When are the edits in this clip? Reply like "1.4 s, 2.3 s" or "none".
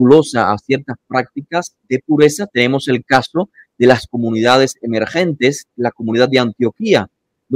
1.8 s, 5.7 s